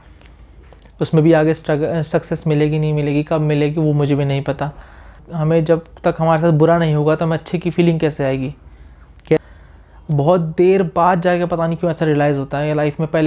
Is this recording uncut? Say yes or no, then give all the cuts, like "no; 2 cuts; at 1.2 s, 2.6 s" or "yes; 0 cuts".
no; 2 cuts; at 5.3 s, 9.4 s